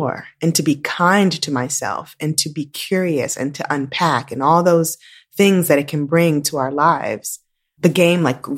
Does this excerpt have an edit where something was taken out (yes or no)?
no